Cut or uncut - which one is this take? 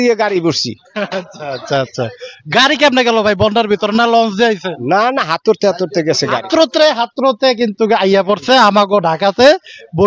uncut